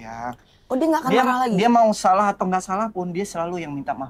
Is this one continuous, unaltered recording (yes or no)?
yes